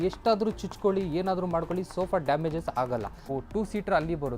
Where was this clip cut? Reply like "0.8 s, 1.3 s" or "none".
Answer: 3.3 s